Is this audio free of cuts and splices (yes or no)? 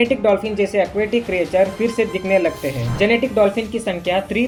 yes